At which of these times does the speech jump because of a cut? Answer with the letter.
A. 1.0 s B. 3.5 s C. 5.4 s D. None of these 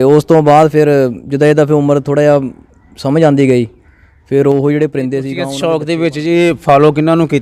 C